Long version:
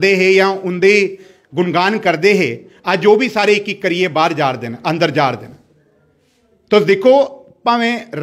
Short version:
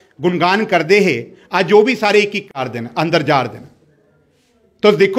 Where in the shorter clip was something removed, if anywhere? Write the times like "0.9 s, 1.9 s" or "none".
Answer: 2.5 s